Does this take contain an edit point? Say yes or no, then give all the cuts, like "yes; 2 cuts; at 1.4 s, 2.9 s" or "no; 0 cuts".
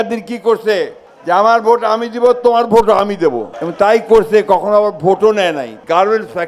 no; 0 cuts